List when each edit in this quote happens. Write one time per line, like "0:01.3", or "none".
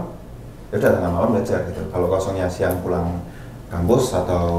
none